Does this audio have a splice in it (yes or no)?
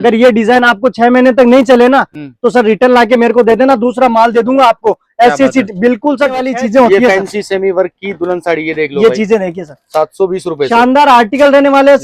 yes